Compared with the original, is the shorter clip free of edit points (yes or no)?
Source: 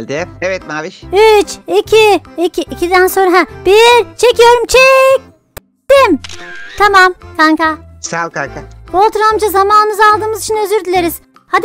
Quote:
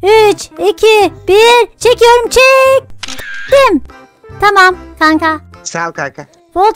no